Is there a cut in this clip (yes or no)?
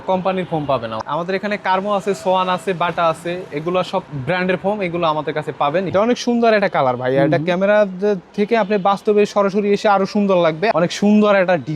yes